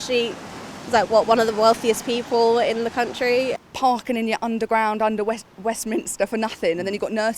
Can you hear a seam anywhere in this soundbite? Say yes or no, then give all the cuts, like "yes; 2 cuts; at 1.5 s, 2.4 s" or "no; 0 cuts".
yes; 1 cut; at 3.6 s